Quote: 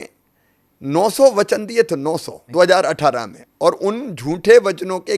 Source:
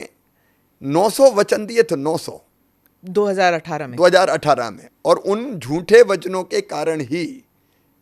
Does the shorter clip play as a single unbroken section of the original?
no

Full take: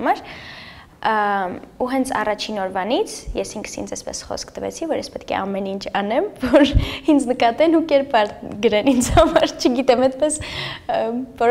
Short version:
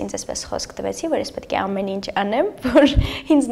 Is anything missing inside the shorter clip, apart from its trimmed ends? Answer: no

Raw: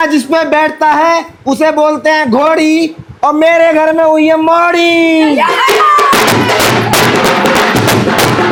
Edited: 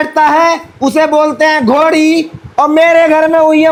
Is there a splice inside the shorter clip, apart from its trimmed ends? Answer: no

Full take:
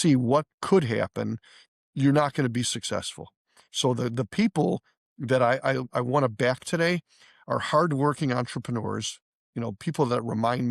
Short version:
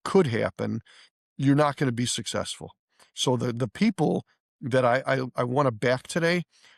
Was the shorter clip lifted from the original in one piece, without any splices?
yes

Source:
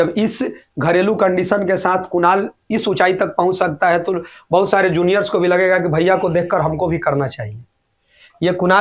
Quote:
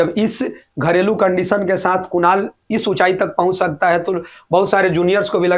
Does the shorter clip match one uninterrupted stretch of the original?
yes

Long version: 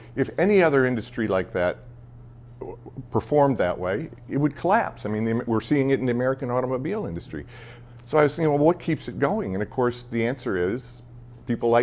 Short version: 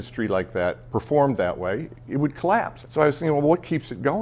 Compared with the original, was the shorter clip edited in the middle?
yes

